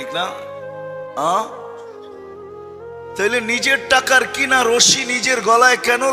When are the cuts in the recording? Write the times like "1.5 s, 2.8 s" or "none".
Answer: 1.6 s, 3.2 s